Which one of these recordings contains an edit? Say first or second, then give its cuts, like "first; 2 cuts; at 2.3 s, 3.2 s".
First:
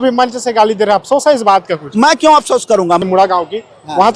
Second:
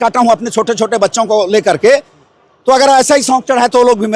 first; 1 cut; at 3.0 s